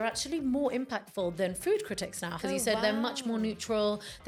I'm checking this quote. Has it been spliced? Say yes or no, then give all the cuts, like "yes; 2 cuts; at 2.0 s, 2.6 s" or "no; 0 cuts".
no; 0 cuts